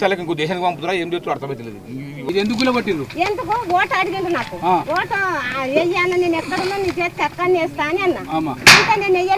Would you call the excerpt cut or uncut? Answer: cut